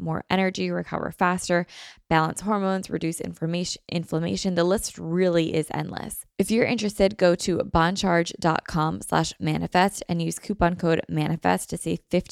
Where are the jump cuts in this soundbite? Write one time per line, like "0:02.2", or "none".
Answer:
0:06.2